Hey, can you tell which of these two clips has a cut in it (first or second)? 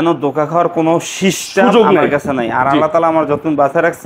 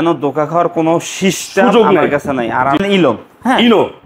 second